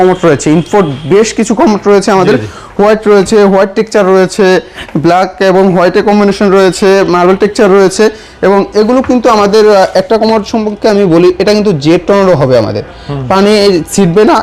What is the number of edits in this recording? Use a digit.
0